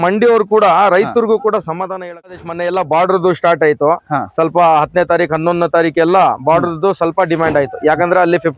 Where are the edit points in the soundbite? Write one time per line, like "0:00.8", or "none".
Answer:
0:02.4